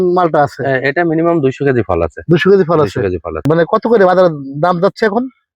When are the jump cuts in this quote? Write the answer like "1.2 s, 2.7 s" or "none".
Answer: 3.5 s